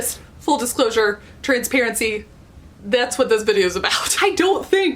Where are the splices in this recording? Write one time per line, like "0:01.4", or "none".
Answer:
0:04.0